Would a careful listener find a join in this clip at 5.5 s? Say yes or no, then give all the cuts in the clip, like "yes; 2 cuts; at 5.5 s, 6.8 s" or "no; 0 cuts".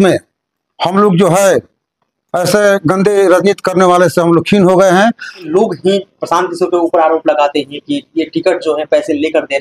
yes; 1 cut; at 5.5 s